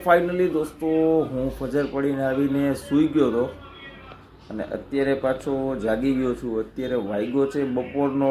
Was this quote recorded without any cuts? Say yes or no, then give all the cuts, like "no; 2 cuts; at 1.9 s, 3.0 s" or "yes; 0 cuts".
yes; 0 cuts